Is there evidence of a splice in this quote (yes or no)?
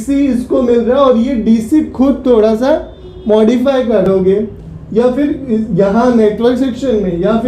yes